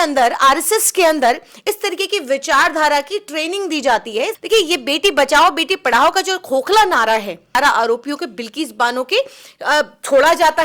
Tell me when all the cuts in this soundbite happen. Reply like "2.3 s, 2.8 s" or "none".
4.4 s, 7.5 s